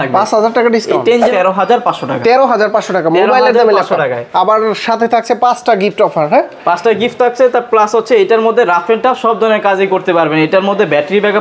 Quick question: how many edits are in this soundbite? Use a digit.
1